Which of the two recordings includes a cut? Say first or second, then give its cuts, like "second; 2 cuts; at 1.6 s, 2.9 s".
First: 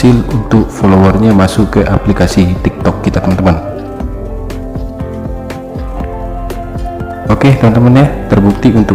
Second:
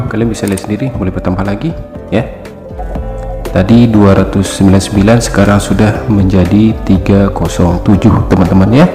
first; 1 cut; at 3.7 s